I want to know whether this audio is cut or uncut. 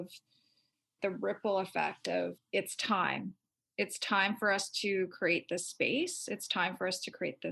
cut